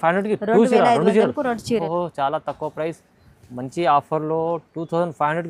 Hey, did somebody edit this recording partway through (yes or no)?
no